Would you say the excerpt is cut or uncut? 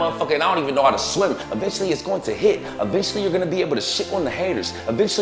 cut